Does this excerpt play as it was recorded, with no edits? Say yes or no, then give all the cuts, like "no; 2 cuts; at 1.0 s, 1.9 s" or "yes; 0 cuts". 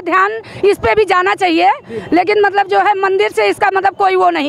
yes; 0 cuts